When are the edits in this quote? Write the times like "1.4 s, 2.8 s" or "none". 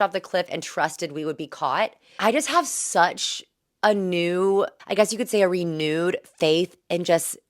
2.0 s, 4.8 s